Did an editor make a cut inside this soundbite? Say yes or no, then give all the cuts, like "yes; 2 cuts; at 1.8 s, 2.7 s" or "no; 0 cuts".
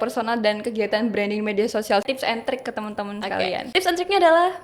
yes; 2 cuts; at 2.0 s, 3.7 s